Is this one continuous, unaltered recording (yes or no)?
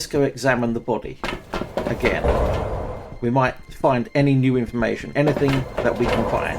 yes